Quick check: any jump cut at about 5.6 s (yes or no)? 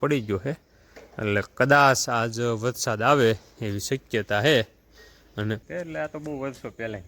yes